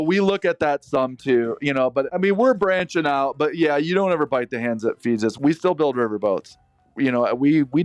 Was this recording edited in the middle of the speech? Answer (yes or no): yes